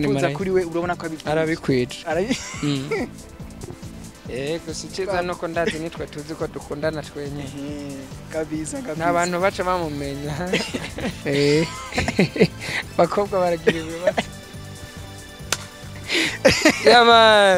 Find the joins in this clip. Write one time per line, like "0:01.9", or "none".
0:11.2